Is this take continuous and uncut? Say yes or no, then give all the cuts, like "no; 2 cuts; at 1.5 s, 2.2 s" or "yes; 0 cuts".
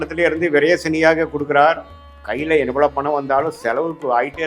yes; 0 cuts